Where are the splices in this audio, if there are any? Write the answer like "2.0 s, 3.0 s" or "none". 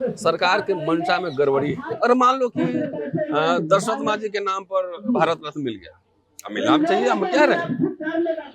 1.8 s